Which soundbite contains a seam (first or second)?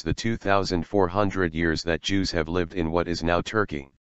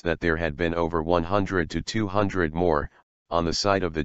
second